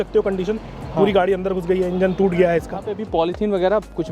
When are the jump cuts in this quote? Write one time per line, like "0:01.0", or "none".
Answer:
0:03.0